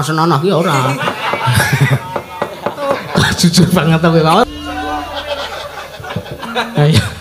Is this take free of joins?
no; 1 cut; at 4.5 s

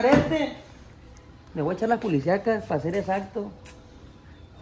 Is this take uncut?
yes; 0 cuts

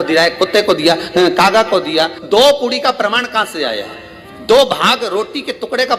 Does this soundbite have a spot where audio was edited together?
yes; 1 cut; at 2.2 s

